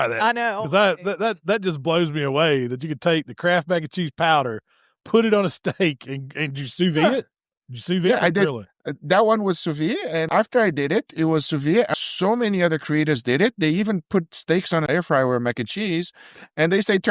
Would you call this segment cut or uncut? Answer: cut